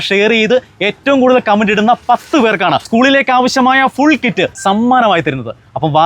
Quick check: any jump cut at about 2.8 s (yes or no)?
yes